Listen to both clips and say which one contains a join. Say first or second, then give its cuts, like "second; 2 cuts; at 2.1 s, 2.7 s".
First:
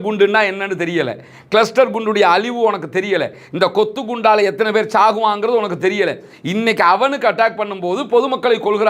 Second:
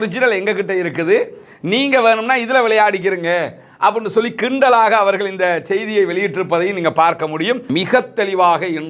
second; 1 cut; at 7.6 s